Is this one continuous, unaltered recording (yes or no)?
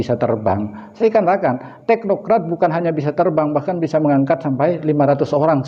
yes